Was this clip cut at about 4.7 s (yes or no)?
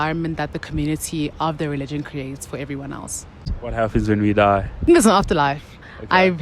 yes